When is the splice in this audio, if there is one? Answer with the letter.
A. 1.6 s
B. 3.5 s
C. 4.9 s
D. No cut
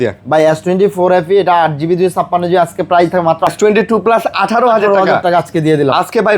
B